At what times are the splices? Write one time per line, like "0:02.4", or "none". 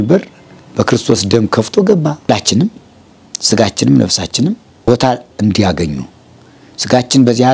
0:02.3
0:04.9